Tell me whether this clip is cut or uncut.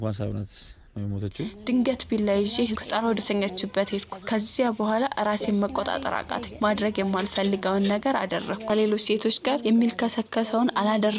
cut